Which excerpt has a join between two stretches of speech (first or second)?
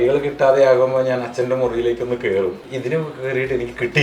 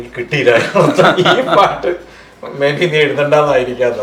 first